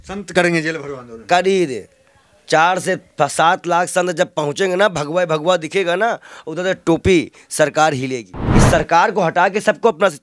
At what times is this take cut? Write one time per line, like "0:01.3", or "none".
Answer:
0:08.3